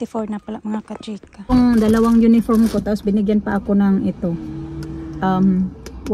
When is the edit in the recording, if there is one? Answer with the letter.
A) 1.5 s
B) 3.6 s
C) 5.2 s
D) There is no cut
A